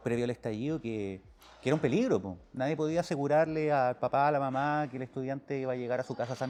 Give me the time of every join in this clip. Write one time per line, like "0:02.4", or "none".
none